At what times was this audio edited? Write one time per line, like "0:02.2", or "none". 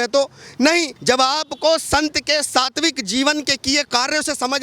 0:00.9